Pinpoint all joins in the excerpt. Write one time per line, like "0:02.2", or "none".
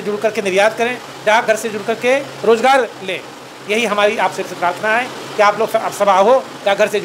none